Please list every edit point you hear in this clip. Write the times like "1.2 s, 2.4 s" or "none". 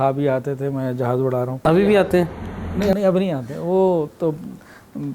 1.5 s